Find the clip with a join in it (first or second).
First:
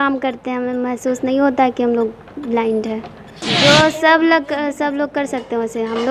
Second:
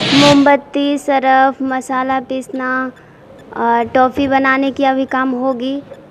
first